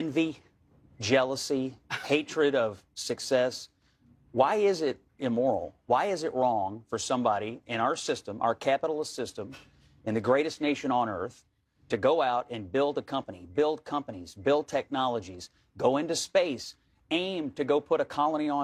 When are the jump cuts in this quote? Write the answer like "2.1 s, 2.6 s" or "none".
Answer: none